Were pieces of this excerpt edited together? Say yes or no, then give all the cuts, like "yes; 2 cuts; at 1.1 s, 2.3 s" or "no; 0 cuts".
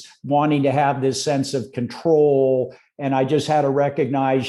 no; 0 cuts